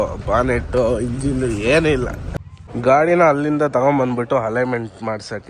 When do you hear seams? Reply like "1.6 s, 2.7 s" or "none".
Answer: 2.2 s